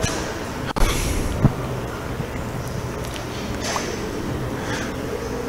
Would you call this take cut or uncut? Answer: uncut